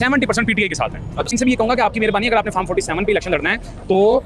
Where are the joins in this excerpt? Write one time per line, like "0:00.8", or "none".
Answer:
0:01.3